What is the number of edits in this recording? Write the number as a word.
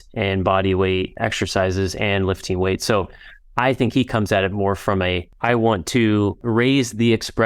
three